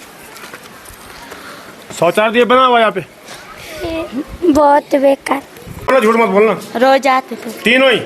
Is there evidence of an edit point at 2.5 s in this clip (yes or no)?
no